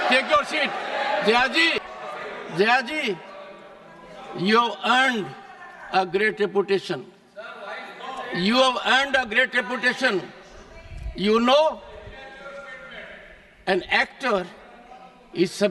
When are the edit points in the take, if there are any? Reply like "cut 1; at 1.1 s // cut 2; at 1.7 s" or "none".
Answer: cut 1; at 1.9 s